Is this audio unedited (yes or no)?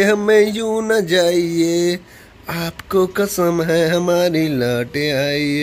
yes